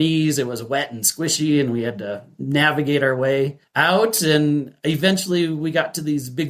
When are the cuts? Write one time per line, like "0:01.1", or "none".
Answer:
none